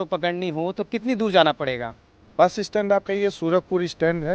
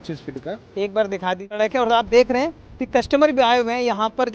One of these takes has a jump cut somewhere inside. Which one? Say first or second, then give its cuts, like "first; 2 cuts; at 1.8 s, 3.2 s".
second; 1 cut; at 1.6 s